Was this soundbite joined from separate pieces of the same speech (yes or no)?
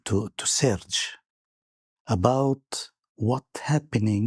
no